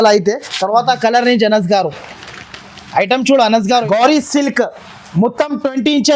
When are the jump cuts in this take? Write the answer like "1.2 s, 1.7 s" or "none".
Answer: 3.8 s